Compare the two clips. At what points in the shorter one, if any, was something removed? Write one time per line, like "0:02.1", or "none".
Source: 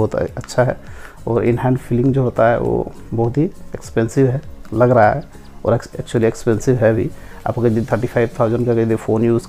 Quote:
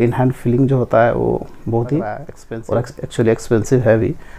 0:02.4